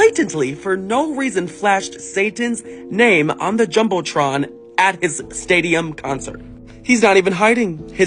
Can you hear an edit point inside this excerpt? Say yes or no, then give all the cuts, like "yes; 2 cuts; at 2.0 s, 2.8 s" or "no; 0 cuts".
no; 0 cuts